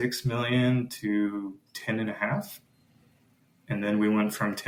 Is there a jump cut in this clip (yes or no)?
no